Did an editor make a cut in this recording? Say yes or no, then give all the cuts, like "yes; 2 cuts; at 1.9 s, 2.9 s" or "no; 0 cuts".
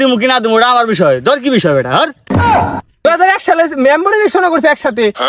yes; 1 cut; at 3.0 s